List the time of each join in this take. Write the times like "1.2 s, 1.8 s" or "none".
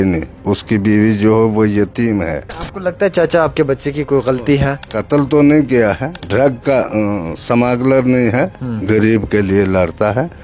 2.7 s, 4.8 s, 6.1 s